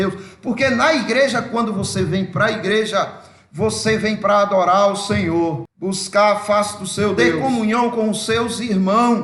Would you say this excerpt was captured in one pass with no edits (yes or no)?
no